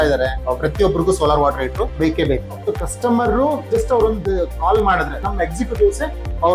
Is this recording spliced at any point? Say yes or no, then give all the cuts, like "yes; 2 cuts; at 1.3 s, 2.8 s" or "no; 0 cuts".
yes; 3 cuts; at 2.0 s, 3.6 s, 5.3 s